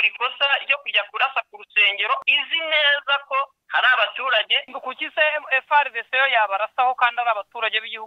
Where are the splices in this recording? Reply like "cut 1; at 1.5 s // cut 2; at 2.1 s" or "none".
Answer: cut 1; at 2.2 s // cut 2; at 3.6 s // cut 3; at 4.6 s

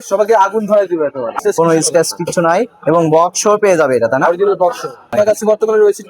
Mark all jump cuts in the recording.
cut 1; at 1.4 s // cut 2; at 5.1 s

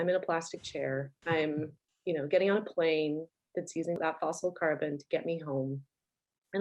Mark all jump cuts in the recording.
cut 1; at 1.1 s // cut 2; at 1.8 s

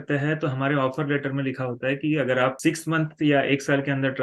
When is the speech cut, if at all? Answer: cut 1; at 2.6 s

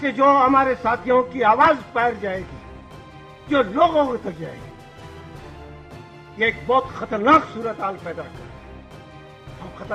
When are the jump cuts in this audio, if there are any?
none

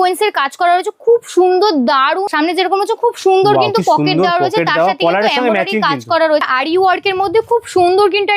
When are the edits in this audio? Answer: cut 1; at 2.3 s // cut 2; at 6.5 s

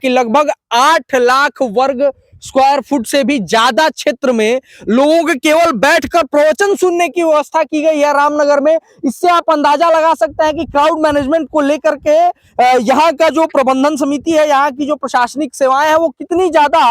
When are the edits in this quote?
none

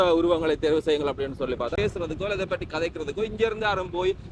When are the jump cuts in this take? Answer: cut 1; at 1.8 s

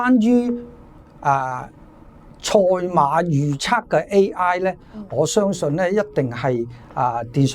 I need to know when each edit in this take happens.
none

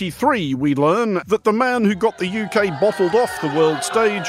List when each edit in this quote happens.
cut 1; at 1.2 s

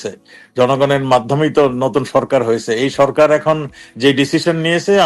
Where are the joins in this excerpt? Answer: none

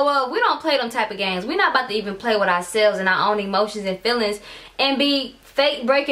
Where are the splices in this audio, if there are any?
none

